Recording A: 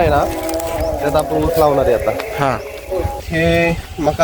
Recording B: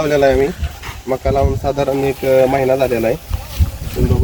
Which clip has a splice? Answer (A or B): A